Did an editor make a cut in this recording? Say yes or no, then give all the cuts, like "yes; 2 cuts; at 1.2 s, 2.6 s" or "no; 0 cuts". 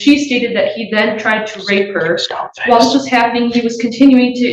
no; 0 cuts